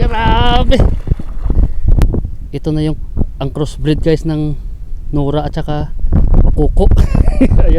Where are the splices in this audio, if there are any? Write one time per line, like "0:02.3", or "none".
0:02.0